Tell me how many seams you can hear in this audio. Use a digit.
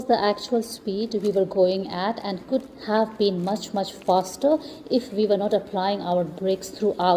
0